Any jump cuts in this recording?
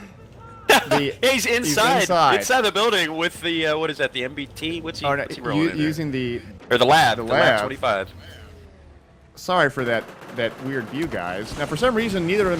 no; 0 cuts

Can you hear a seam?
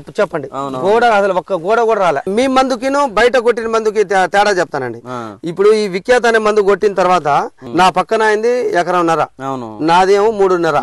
yes; 2 cuts; at 2.3 s, 7.6 s

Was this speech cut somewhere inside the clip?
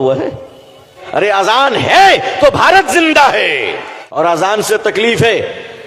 yes; 2 cuts; at 0.9 s, 4.2 s

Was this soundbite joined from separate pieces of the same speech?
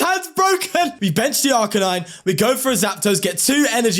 yes; 1 cut; at 0.9 s

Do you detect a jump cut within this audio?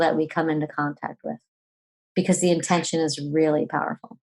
no; 0 cuts

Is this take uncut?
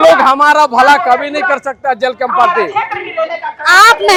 yes; 0 cuts

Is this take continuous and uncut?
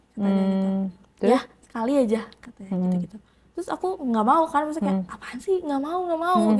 yes; 0 cuts

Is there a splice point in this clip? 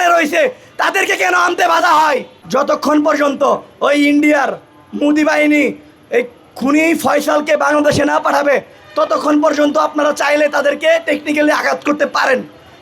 yes; 1 cut; at 2.4 s

